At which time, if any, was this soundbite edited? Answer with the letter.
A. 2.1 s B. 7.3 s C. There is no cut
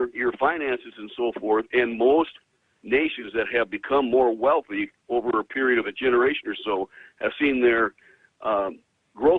B